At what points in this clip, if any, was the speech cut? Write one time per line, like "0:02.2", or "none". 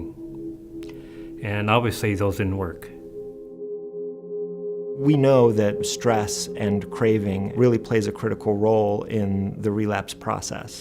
0:01.1